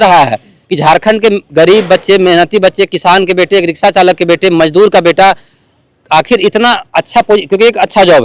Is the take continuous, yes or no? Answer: yes